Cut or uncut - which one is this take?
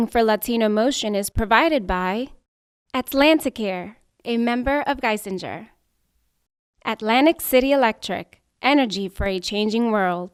uncut